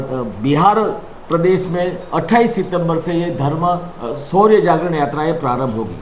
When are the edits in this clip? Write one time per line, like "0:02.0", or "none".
none